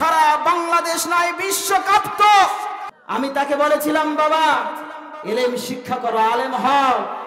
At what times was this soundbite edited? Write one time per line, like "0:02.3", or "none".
0:02.8